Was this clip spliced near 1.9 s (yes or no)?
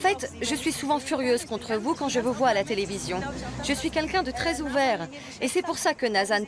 no